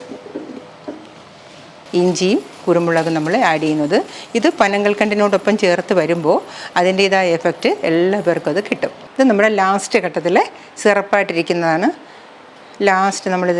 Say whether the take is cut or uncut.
cut